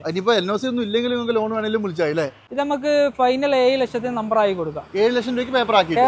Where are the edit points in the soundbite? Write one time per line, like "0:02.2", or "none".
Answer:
0:02.4